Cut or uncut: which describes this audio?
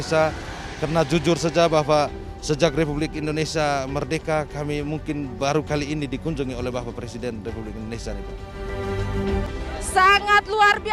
cut